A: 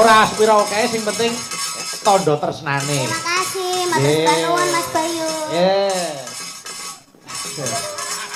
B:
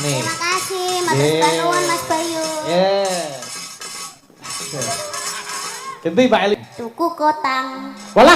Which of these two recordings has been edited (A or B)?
B